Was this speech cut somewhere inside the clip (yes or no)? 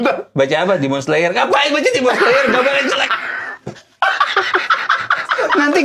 no